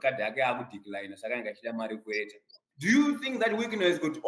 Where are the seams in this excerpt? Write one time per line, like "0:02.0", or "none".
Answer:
0:02.6